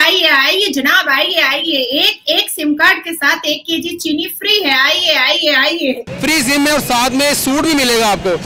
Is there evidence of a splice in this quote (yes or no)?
no